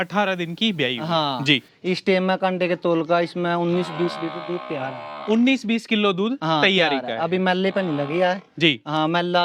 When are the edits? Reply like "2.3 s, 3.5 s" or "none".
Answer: none